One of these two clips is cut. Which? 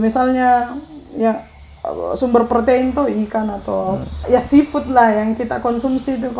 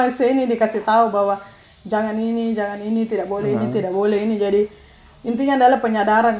first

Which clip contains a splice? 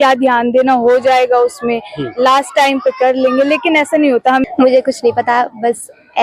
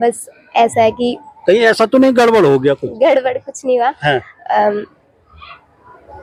first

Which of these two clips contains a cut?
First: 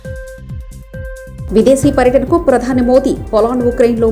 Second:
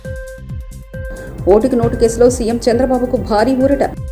second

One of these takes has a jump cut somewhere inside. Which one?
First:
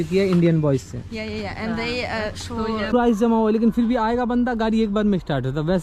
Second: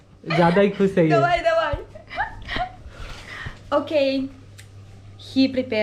first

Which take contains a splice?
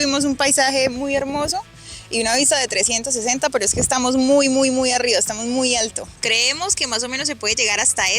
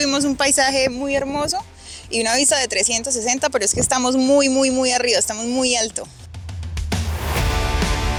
first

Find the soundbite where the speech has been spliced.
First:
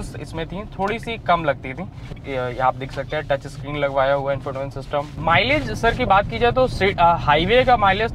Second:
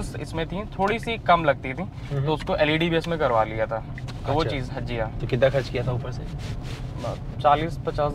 first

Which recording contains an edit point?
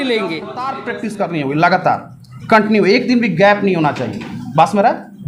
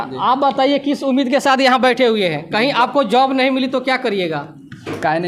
first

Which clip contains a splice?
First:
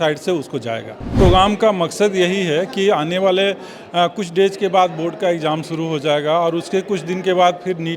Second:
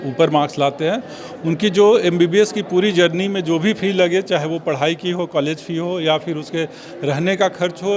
first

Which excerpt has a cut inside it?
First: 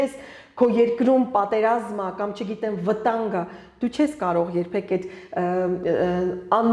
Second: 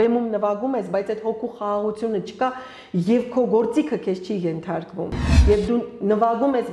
second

